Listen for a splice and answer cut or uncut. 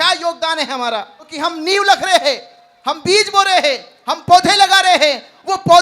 cut